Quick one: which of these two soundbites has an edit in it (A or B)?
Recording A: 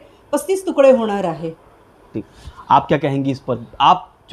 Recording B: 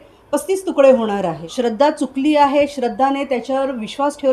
B